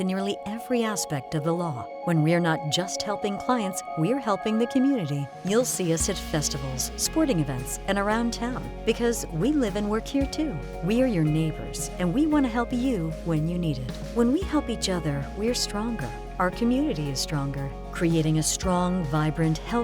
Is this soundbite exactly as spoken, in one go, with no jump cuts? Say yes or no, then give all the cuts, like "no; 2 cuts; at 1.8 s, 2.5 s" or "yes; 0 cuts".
yes; 0 cuts